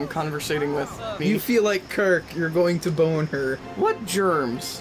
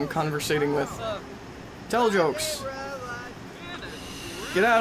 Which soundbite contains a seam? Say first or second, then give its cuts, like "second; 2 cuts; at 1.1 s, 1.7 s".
first; 2 cuts; at 1.2 s, 3.6 s